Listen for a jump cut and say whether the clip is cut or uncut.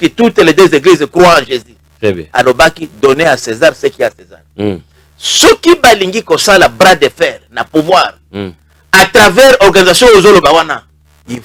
uncut